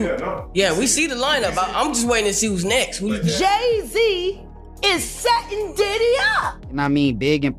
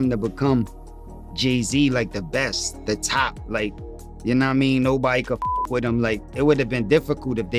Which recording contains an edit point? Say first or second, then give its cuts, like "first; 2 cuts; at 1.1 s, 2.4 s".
first; 1 cut; at 6.6 s